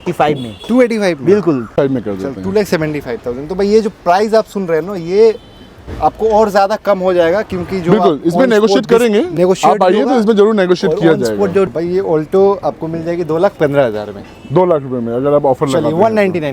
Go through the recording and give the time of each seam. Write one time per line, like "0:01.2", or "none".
0:01.7
0:11.7